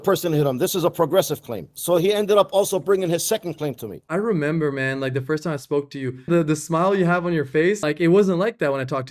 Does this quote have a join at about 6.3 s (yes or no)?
yes